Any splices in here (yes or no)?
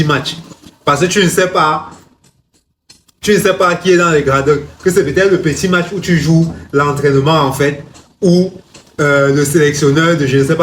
no